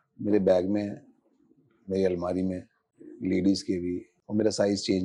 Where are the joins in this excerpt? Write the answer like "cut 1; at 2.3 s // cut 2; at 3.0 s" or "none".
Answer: cut 1; at 4.1 s